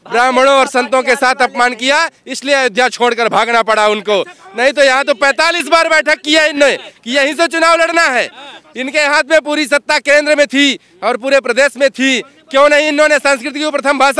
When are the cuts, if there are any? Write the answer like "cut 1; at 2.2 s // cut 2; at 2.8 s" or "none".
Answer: none